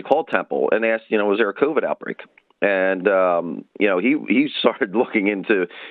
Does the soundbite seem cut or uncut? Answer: uncut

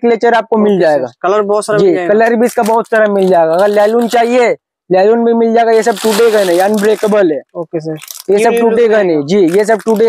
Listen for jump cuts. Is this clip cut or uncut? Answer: uncut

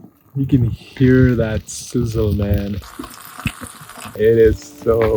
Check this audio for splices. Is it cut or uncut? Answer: cut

